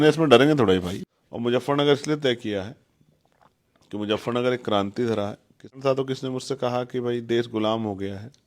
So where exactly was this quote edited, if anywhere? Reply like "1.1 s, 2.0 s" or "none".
0.9 s, 5.8 s